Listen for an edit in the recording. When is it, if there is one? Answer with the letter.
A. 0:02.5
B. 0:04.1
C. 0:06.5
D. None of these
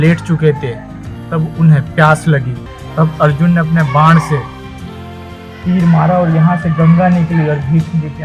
A